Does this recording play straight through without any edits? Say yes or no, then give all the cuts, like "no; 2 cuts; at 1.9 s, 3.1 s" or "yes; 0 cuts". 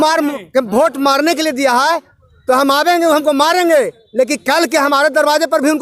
yes; 0 cuts